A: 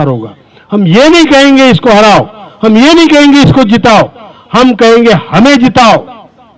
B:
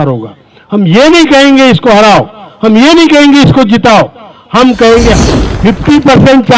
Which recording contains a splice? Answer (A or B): B